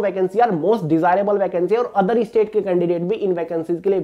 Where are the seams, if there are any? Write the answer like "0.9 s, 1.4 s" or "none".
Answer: none